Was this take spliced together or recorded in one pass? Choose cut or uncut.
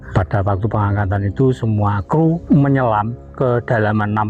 cut